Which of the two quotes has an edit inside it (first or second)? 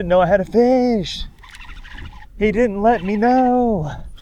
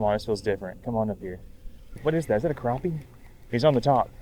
second